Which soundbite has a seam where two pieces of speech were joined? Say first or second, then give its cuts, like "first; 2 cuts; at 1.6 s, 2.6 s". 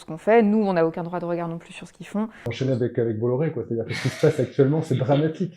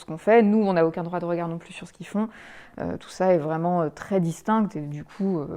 first; 1 cut; at 2.5 s